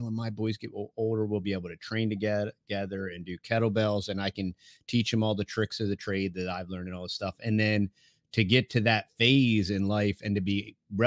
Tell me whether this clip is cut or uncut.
uncut